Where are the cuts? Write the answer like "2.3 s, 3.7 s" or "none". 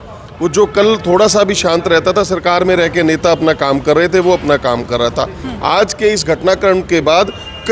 none